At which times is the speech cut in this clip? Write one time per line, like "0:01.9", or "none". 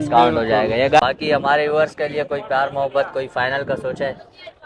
0:01.0